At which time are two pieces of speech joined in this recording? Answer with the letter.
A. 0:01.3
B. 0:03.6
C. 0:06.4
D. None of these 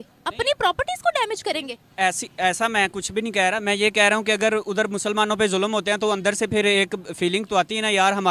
D